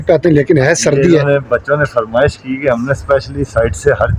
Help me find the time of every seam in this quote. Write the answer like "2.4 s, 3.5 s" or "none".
none